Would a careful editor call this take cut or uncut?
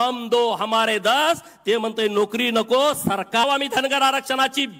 cut